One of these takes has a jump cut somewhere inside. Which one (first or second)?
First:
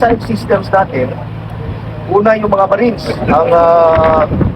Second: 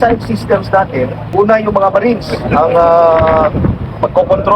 second